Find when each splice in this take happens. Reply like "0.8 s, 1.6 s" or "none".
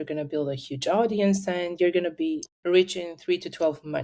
2.5 s